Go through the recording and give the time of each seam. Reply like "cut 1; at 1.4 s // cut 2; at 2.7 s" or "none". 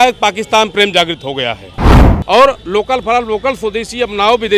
cut 1; at 2.1 s